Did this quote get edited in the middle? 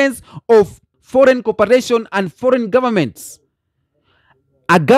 yes; 1 cut; at 0.9 s

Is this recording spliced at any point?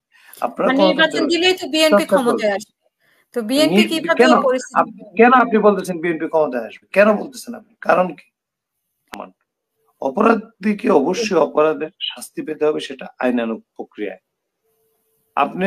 yes; 1 cut; at 9.0 s

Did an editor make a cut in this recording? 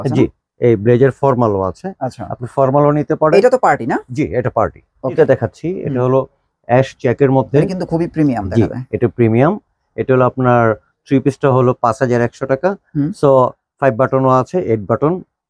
yes; 1 cut; at 5.2 s

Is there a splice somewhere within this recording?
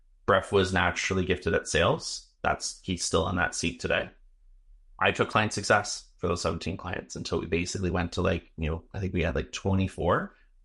yes; 1 cut; at 5.3 s

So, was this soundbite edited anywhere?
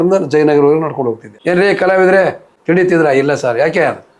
yes; 2 cuts; at 1.3 s, 2.5 s

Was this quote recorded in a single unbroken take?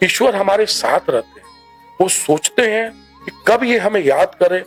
yes; 0 cuts

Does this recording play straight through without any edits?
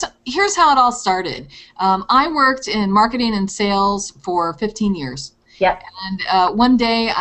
no; 1 cut; at 1.4 s

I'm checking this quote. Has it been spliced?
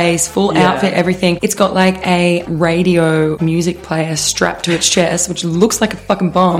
yes; 2 cuts; at 1.4 s, 3.4 s

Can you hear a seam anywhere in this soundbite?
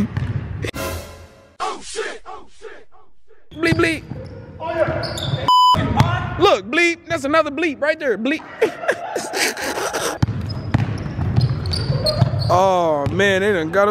yes; 3 cuts; at 0.7 s, 3.5 s, 10.2 s

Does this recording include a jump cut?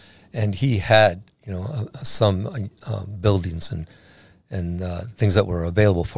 no; 0 cuts

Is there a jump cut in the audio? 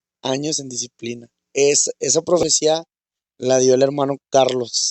yes; 1 cut; at 1.5 s

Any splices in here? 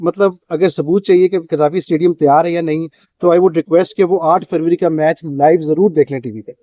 no; 0 cuts

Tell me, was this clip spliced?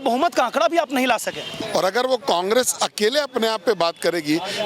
yes; 1 cut; at 1.5 s

